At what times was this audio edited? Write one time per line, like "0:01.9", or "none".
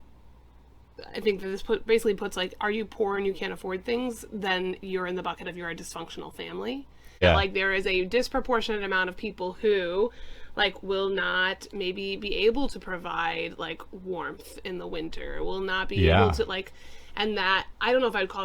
0:07.2